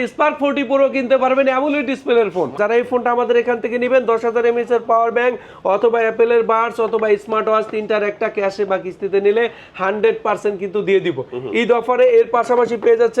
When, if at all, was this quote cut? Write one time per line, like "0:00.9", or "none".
0:02.5